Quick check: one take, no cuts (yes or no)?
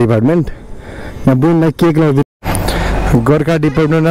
no